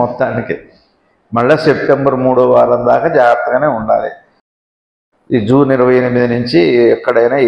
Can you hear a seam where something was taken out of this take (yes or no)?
yes